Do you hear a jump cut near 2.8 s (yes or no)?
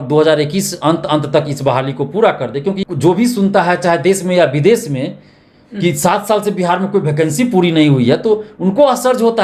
yes